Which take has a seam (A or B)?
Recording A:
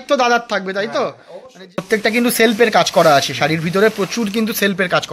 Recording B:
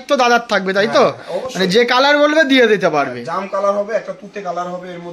A